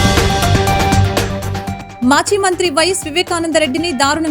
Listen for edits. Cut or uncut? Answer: cut